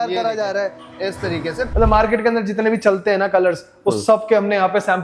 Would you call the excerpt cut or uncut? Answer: cut